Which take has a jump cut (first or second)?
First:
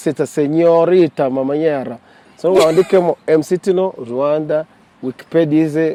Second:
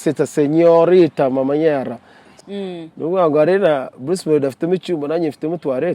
second